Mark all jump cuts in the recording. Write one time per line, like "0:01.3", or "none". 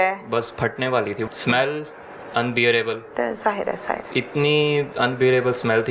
0:01.3
0:04.0